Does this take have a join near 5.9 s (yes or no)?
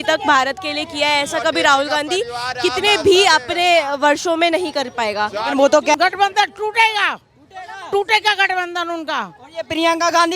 yes